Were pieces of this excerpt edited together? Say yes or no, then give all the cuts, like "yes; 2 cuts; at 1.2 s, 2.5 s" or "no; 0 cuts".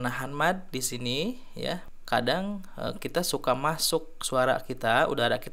yes; 1 cut; at 1.9 s